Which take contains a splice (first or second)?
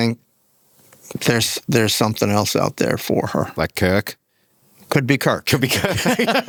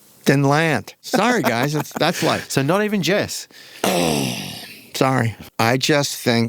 second